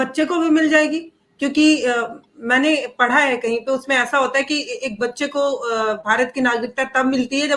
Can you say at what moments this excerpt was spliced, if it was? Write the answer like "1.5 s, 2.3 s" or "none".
none